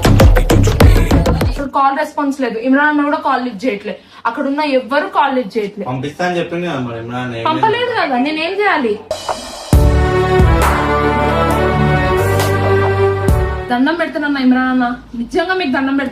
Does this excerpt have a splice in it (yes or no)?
yes